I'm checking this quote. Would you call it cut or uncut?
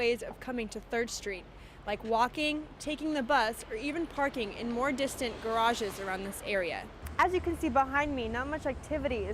cut